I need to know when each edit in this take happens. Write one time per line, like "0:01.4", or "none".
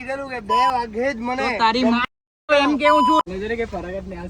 0:03.3